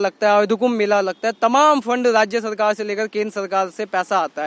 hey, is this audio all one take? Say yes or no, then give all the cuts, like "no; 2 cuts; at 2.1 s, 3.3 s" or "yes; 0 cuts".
yes; 0 cuts